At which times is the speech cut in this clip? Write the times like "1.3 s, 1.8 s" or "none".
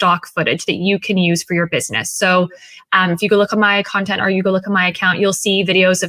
none